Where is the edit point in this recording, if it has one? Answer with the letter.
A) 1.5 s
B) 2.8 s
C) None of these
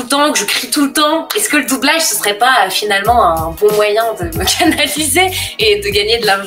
C